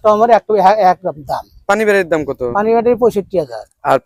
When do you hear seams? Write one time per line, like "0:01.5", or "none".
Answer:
none